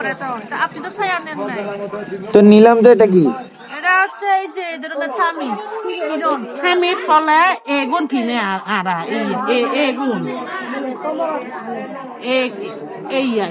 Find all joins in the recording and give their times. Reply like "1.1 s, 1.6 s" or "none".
none